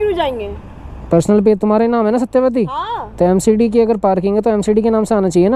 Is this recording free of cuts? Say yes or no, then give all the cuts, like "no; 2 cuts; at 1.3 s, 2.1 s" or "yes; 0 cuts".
yes; 0 cuts